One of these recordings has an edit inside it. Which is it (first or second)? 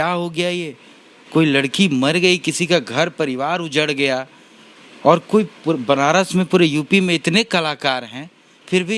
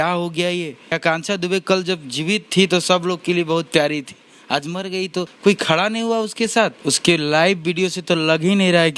second